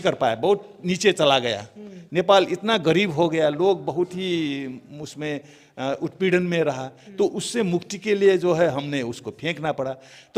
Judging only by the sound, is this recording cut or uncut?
uncut